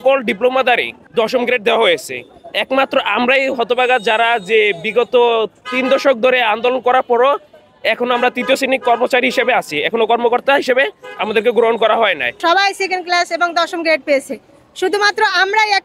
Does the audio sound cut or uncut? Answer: cut